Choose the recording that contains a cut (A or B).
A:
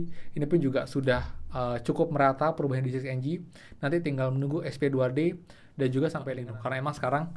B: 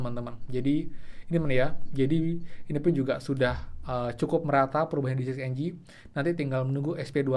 A